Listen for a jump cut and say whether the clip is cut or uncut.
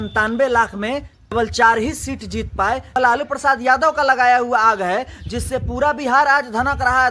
cut